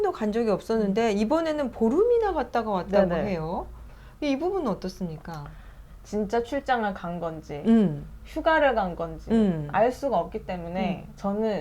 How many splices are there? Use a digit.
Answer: 0